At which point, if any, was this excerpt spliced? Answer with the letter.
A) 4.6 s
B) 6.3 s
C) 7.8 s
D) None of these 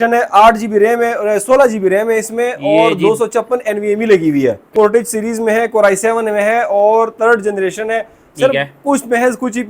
A